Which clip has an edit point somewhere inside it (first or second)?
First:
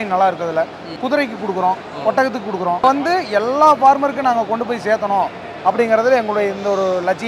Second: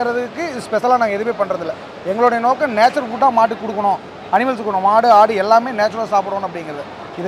first